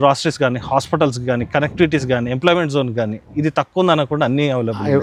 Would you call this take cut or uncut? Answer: uncut